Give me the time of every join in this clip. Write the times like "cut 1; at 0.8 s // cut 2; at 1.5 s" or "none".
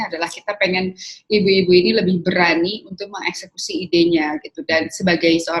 none

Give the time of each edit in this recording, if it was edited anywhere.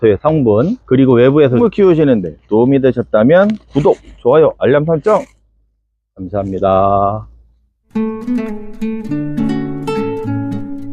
cut 1; at 1.6 s

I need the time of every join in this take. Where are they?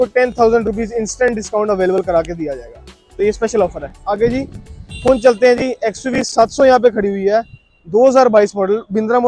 none

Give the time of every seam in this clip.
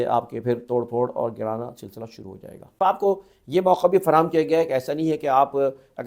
cut 1; at 2.8 s

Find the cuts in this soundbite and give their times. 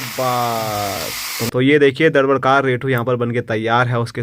cut 1; at 1.5 s

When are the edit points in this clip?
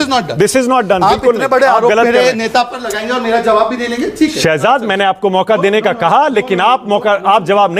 none

